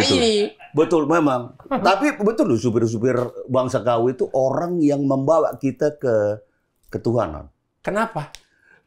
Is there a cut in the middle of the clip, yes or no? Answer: no